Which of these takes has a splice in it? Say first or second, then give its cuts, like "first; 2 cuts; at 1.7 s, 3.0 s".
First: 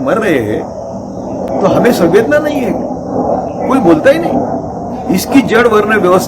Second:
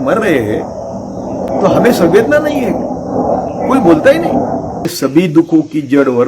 second; 1 cut; at 4.9 s